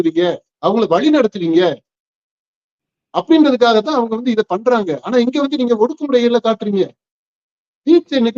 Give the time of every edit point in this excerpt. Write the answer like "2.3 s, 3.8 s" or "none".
none